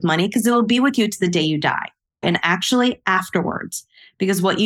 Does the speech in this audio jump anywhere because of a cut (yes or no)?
yes